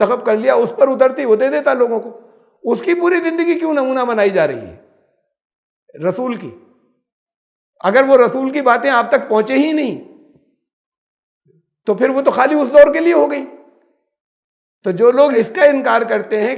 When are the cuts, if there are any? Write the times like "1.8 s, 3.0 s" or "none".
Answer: 15.3 s